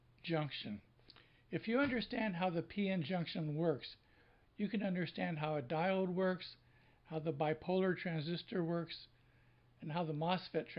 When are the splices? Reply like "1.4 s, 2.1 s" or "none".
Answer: none